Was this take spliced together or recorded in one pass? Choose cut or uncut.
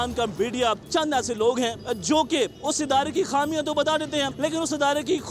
cut